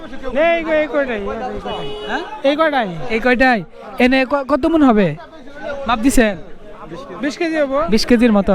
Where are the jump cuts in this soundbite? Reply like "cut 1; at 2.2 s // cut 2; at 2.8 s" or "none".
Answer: none